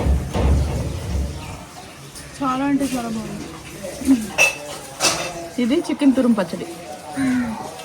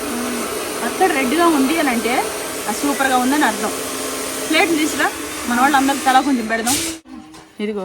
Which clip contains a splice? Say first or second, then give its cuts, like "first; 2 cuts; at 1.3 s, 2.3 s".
second; 1 cut; at 6.9 s